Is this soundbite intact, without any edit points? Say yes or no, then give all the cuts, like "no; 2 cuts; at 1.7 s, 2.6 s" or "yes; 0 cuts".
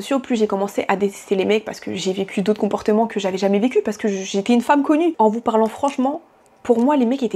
no; 1 cut; at 5.1 s